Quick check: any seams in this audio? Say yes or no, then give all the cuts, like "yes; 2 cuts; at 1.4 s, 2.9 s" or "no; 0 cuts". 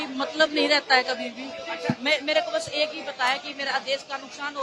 no; 0 cuts